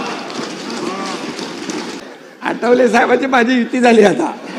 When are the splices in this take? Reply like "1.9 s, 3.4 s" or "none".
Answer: 2.0 s